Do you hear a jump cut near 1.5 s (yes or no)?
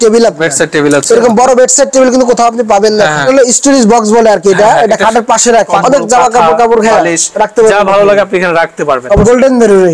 no